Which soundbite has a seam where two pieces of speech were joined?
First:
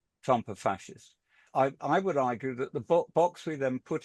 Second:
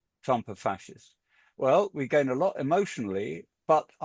first; 1 cut; at 1.5 s

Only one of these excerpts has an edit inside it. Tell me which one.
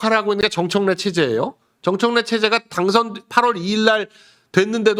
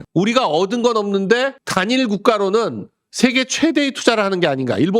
second; 1 cut; at 1.6 s

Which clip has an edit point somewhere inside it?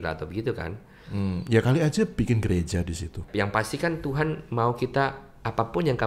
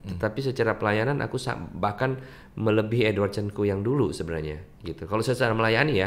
first; 1 cut; at 3.3 s

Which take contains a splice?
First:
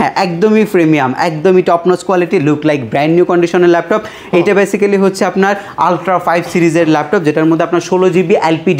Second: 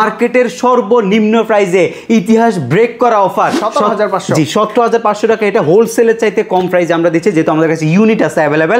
second; 1 cut; at 3.6 s

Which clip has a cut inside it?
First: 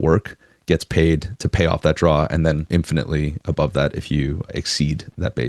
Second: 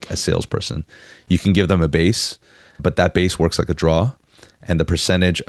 first; 1 cut; at 2.6 s

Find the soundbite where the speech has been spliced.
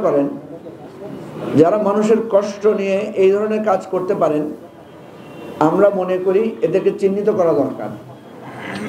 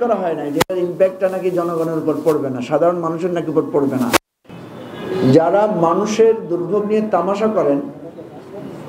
second; 1 cut; at 4.4 s

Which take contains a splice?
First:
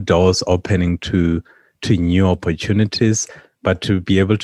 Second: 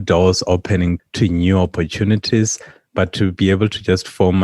second; 1 cut; at 1.0 s

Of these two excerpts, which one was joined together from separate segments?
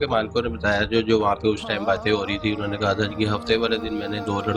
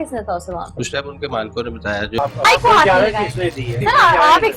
second; 1 cut; at 2.1 s

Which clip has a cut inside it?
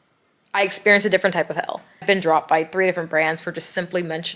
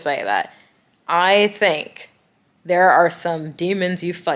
first; 1 cut; at 2.0 s

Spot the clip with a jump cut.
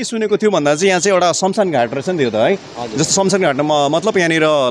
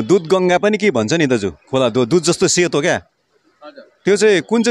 second; 1 cut; at 1.6 s

